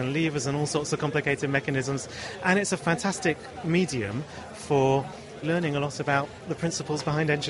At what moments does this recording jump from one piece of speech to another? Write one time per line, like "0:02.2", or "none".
0:05.4